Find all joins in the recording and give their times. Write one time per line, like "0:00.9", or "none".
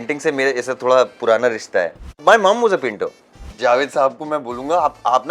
0:02.1
0:03.4

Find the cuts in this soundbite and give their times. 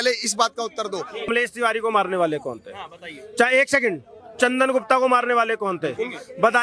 0:01.3

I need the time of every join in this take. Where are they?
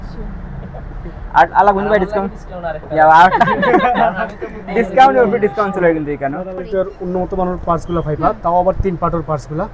0:06.6

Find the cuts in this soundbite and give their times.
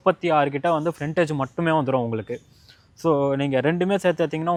none

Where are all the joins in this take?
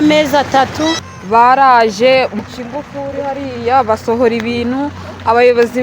0:01.1
0:02.4

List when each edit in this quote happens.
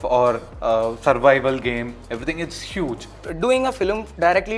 0:03.2

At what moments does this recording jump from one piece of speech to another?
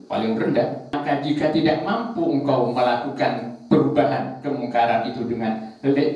0:00.9
0:03.5

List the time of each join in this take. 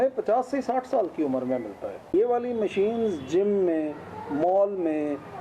0:02.1

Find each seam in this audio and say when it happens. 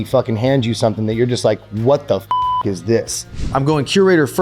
0:03.4

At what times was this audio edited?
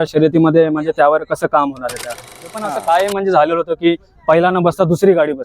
0:02.6

